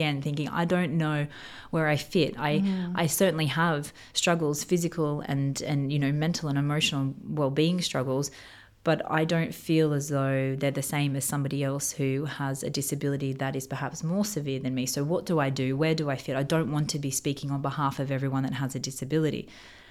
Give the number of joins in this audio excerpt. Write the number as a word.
zero